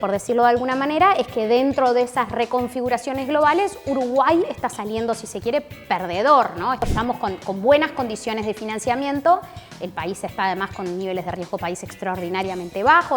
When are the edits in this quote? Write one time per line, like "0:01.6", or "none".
0:06.8